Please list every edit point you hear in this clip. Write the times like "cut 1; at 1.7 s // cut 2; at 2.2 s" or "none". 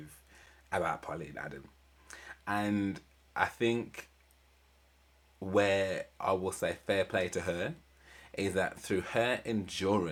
none